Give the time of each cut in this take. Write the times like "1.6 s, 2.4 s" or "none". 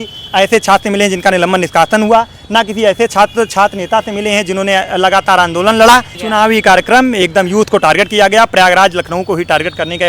6.2 s